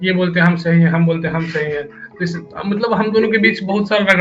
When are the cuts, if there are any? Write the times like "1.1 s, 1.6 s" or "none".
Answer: none